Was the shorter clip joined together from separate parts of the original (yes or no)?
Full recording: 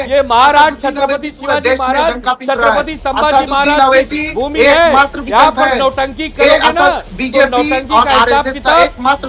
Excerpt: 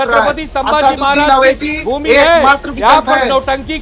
no